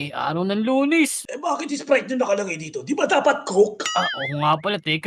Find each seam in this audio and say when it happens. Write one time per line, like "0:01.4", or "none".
none